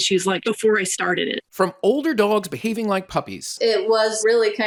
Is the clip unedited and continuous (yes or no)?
yes